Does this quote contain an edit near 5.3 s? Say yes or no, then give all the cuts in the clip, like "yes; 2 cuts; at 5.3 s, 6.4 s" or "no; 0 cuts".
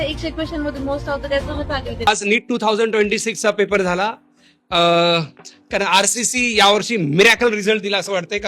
no; 1 cut; at 1.8 s